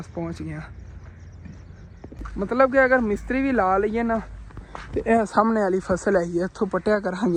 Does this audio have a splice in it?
no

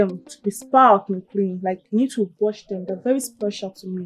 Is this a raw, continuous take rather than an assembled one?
yes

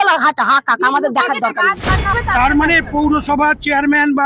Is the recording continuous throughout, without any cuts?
no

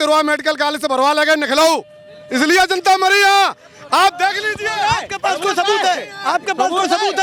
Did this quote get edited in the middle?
no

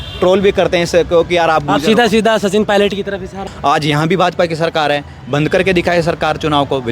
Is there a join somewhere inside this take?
yes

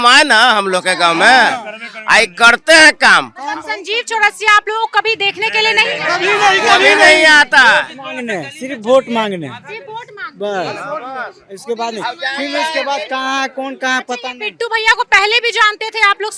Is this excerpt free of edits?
yes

